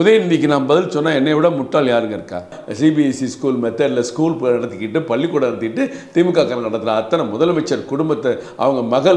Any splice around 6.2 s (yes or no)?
no